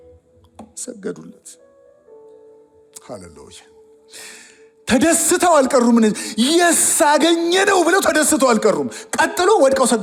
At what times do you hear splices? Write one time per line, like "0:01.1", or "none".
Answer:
none

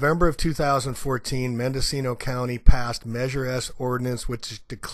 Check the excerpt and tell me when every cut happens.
none

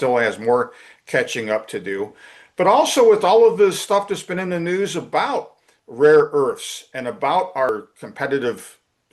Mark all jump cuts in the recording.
0:07.7

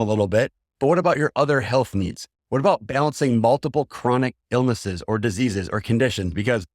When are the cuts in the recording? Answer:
none

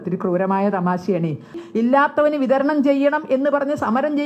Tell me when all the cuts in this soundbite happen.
0:01.6

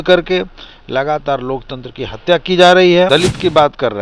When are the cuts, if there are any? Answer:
0:03.1

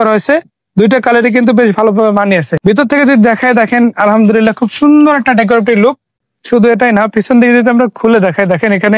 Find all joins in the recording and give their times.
0:02.5
0:06.2

